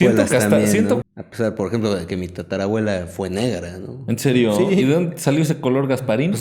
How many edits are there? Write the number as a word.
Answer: one